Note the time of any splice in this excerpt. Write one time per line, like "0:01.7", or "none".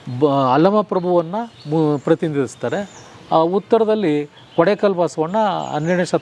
none